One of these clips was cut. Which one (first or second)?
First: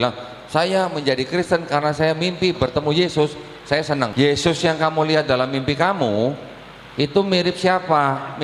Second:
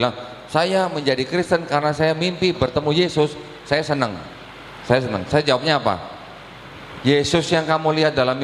first